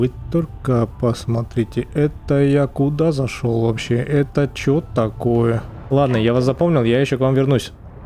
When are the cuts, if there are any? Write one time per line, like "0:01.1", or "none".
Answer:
0:05.9